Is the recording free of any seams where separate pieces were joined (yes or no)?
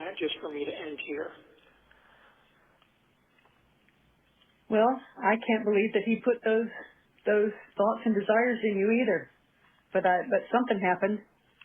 yes